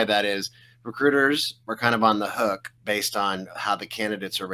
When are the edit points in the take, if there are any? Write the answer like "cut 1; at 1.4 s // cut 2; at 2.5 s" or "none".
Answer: cut 1; at 2.7 s